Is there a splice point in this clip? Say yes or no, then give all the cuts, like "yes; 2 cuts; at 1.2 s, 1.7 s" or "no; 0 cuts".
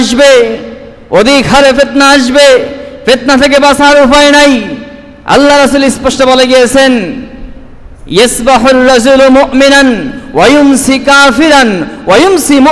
no; 0 cuts